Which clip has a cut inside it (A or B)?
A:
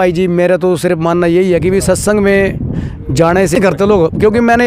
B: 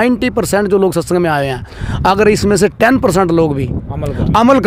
A